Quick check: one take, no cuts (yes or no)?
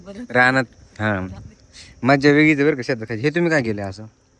yes